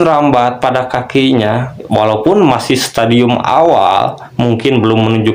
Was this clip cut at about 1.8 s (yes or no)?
no